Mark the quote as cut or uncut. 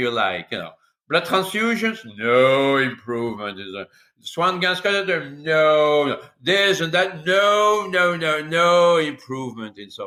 uncut